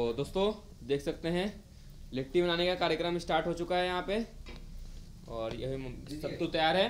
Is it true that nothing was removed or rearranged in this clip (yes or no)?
yes